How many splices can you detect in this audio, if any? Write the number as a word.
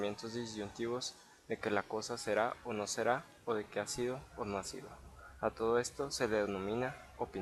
zero